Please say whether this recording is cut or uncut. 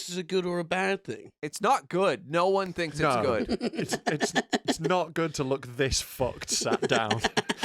uncut